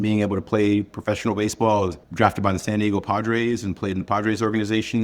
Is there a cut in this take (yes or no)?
yes